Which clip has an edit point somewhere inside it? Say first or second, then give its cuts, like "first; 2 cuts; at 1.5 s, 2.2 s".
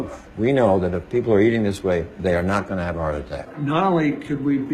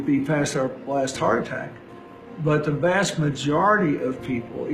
first; 1 cut; at 3.5 s